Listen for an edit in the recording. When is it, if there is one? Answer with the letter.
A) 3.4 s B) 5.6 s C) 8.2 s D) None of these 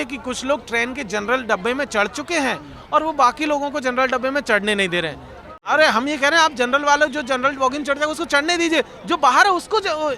B